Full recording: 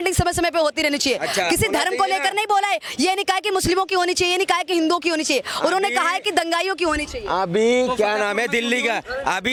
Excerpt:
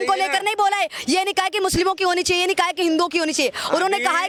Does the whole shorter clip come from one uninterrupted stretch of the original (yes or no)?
yes